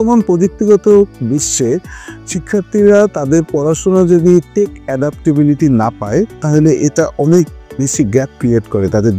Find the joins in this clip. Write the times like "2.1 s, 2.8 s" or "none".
none